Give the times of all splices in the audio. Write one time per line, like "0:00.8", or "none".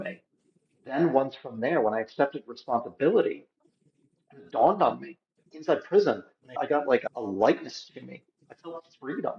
0:06.6